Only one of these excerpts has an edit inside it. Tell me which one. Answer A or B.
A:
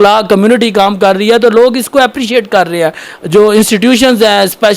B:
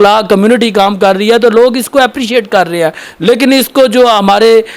A